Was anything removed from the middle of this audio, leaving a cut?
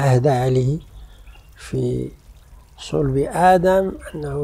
no; 0 cuts

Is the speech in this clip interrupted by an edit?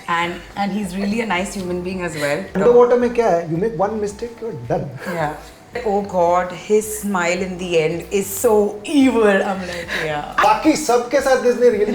yes; 3 cuts; at 2.5 s, 5.8 s, 10.4 s

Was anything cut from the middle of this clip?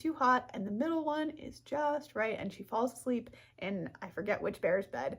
yes; 1 cut; at 2.4 s

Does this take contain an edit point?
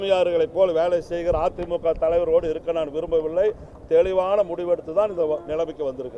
no; 0 cuts

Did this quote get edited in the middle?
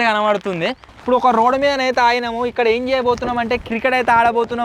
yes; 1 cut; at 1.0 s

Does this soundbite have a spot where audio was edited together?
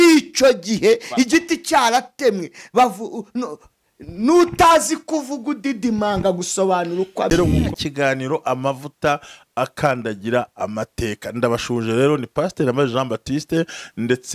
no; 0 cuts

